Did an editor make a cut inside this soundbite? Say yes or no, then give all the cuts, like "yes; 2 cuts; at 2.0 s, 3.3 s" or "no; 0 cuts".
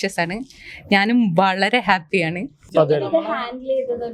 yes; 1 cut; at 2.6 s